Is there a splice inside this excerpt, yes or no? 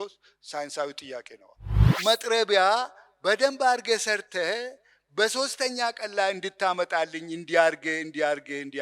yes